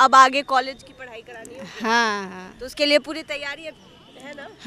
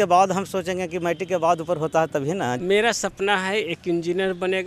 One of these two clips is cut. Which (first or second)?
second